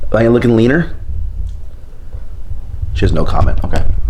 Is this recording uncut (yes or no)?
yes